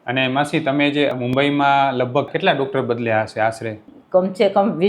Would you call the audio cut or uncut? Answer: cut